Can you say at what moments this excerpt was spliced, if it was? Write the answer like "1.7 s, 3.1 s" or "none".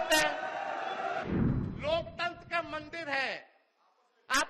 1.2 s

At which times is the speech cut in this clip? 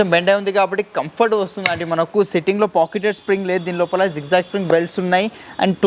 none

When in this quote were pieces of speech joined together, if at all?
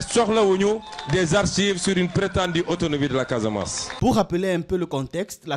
none

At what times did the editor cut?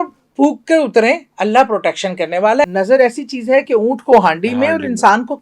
2.6 s

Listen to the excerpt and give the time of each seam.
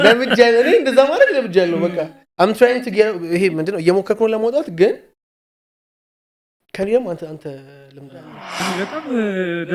8.6 s

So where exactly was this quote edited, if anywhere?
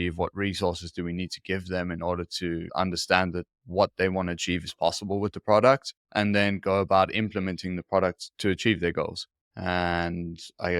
2.7 s

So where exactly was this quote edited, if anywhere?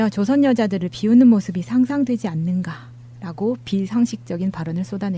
1.3 s

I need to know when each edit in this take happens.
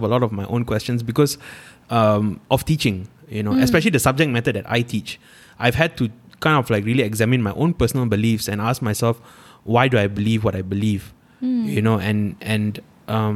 none

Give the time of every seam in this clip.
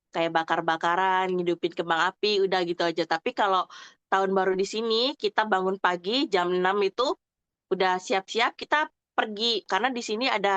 9.7 s

